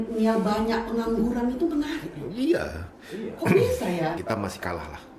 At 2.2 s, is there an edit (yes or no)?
no